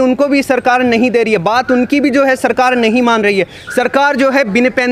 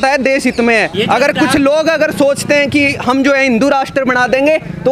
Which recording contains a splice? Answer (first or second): second